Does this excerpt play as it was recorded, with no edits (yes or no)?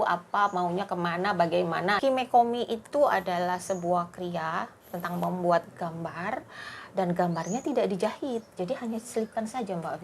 no